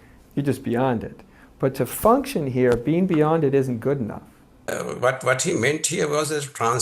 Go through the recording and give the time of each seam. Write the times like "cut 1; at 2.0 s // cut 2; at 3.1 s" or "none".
cut 1; at 4.6 s